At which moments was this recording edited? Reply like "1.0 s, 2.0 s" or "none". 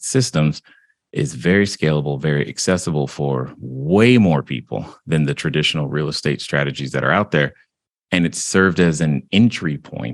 none